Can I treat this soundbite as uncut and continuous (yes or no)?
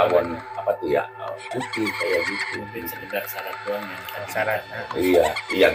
yes